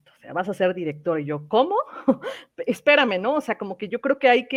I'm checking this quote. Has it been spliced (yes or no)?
no